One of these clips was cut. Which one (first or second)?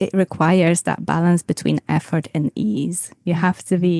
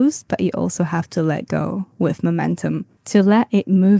second